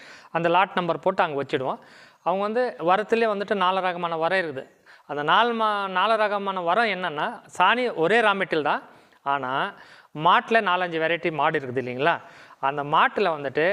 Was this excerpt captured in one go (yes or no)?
yes